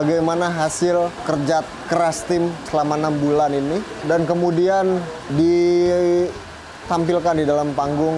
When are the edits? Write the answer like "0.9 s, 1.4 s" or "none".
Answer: 1.2 s, 2.6 s, 3.9 s, 5.2 s